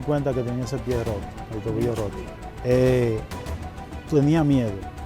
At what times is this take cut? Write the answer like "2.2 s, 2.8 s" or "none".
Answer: 2.5 s